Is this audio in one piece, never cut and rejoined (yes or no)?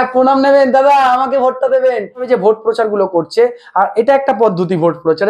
no